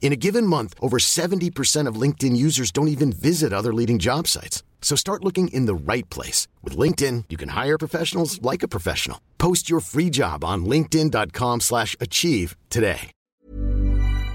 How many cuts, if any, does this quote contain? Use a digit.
1